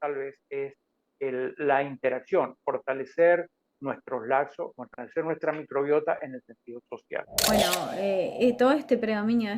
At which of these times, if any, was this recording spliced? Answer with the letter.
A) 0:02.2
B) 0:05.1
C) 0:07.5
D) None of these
C